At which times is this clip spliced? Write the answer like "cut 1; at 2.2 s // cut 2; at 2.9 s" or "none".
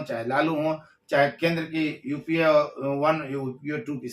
none